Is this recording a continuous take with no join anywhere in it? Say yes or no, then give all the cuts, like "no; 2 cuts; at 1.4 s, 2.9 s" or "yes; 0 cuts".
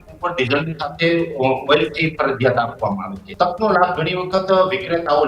no; 1 cut; at 3.2 s